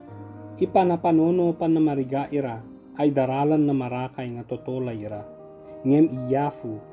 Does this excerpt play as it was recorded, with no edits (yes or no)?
yes